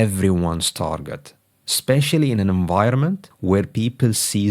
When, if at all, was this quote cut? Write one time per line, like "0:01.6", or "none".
0:03.3